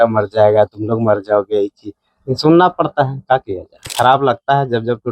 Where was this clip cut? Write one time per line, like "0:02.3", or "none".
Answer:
0:03.9